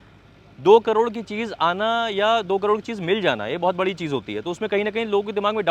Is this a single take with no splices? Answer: yes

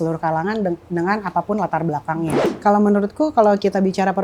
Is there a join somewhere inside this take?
yes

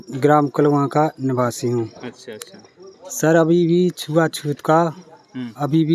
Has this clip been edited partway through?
no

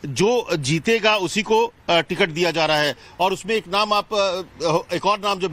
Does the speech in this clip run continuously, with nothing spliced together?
no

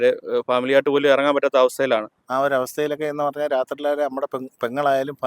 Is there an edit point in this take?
yes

